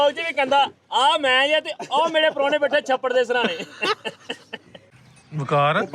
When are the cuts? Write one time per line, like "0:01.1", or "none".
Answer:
0:04.8